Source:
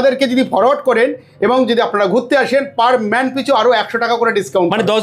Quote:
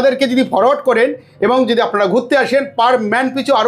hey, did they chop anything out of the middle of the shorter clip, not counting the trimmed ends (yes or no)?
no